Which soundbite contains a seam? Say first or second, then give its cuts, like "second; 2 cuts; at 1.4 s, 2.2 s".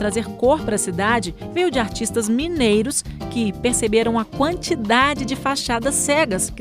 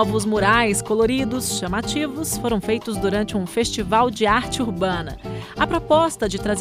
first; 1 cut; at 1.4 s